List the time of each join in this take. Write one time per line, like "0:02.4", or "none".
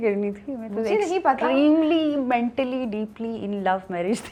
none